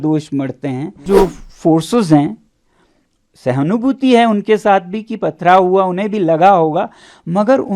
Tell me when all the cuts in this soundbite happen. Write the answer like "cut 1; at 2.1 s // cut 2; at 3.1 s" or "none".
cut 1; at 1.0 s